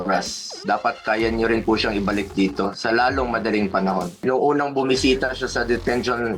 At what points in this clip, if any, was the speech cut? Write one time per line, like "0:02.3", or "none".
0:04.2